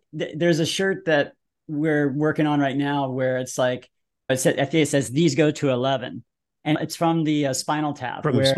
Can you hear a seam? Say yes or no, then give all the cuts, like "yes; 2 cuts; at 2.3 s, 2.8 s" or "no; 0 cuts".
yes; 2 cuts; at 4.3 s, 6.8 s